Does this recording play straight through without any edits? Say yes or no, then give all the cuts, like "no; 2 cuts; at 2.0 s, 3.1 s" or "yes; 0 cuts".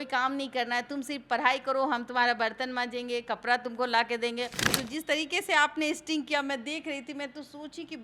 no; 1 cut; at 4.6 s